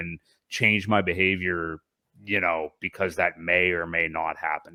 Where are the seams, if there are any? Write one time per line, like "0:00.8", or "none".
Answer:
none

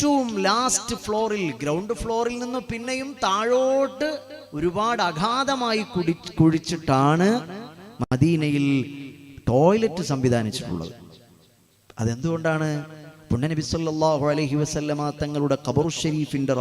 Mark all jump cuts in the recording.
none

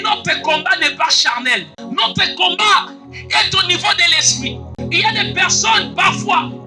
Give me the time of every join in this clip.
0:01.7
0:04.8

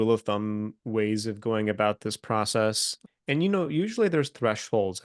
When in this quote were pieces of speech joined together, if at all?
0:02.9

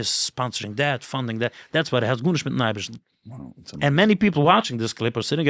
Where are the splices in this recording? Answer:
none

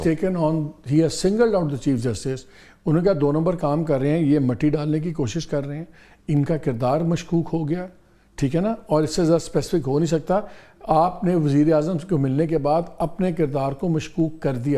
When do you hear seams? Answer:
none

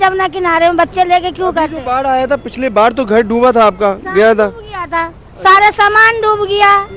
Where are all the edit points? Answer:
none

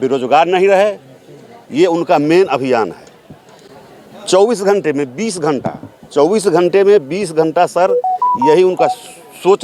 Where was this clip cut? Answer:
none

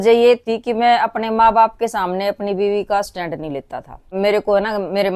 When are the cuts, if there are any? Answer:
0:04.1

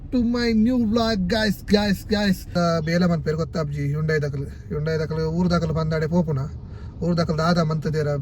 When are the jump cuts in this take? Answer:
0:02.5

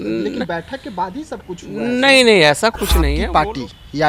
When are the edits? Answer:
0:03.2

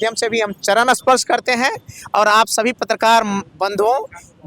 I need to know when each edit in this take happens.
none

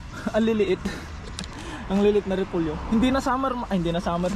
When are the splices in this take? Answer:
none

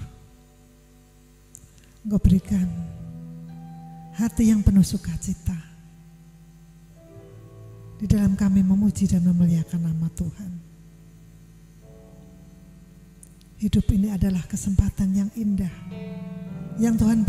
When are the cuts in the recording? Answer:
none

